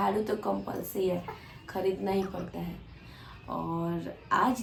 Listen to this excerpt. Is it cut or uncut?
uncut